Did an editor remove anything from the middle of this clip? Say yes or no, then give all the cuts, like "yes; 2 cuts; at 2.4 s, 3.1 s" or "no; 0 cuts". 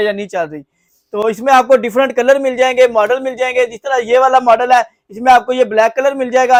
no; 0 cuts